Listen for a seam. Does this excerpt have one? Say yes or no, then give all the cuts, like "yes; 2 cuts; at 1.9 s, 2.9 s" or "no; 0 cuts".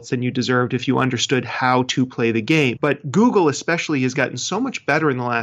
yes; 1 cut; at 2.8 s